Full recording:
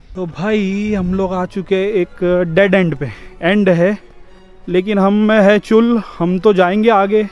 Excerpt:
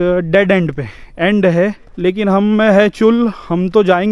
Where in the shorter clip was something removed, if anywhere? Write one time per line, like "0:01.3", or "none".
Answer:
0:01.9